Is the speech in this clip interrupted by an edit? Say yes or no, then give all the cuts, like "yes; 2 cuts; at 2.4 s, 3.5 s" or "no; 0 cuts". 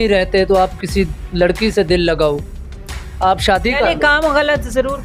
no; 0 cuts